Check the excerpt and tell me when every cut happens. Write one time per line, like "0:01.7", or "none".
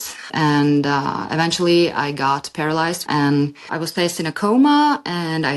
0:03.0